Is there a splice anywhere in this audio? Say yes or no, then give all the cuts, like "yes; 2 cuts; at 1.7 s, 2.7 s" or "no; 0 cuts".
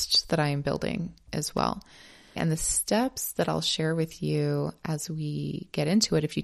yes; 1 cut; at 2.4 s